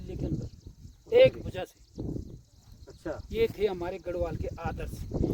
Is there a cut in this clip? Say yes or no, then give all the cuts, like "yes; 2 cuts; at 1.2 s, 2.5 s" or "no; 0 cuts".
no; 0 cuts